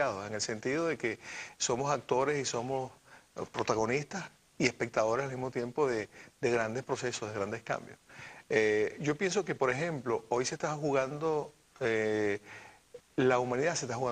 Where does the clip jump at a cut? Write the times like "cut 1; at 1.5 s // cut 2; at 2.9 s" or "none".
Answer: cut 1; at 4.3 s